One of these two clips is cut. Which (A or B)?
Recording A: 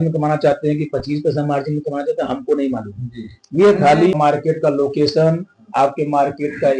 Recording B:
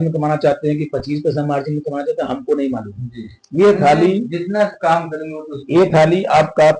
A